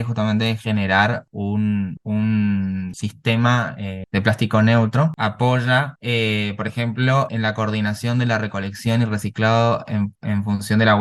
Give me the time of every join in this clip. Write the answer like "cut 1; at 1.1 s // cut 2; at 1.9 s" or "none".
cut 1; at 5.2 s // cut 2; at 7.3 s